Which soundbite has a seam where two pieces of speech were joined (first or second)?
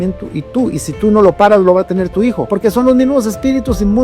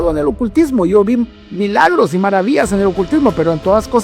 first